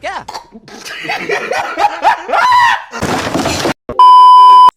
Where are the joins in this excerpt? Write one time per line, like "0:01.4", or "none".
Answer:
0:03.8